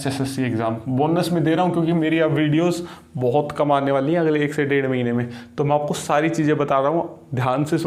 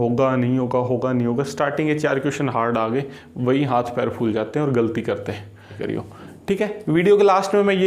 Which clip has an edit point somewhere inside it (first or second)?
second